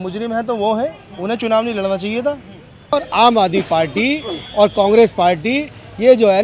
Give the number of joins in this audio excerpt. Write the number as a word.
one